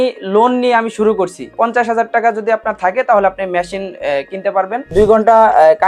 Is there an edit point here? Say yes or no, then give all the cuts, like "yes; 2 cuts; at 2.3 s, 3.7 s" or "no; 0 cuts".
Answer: yes; 2 cuts; at 1.4 s, 4.8 s